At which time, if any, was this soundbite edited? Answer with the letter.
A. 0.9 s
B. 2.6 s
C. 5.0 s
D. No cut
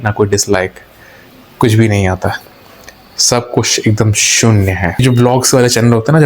C